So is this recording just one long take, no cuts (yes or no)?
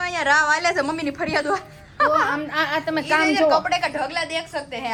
yes